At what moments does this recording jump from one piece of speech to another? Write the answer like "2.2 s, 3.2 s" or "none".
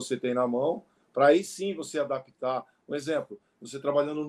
none